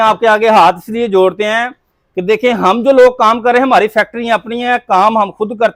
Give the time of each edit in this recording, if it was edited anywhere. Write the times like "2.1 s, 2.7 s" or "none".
none